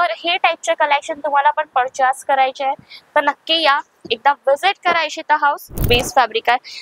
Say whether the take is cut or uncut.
cut